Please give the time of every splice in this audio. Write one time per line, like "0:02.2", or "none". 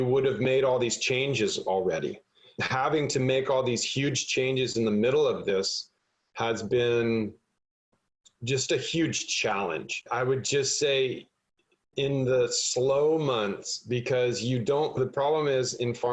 none